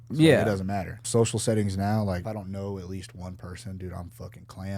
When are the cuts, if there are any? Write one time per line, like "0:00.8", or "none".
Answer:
0:01.0
0:02.2